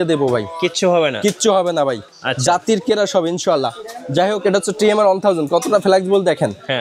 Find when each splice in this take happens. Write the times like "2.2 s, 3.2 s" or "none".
none